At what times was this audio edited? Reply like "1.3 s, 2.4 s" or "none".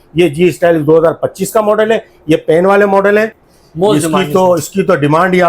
3.4 s